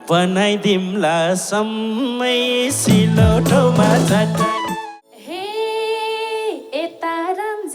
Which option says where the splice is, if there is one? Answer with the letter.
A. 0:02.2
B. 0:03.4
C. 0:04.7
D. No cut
C